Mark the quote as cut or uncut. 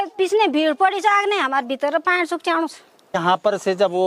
cut